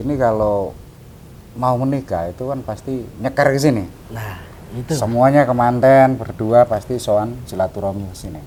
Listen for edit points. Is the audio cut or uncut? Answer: uncut